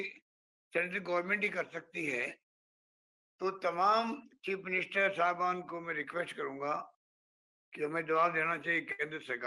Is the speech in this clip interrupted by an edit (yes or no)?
no